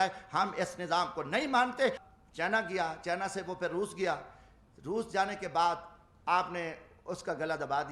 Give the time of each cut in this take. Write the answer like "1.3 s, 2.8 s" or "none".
2.1 s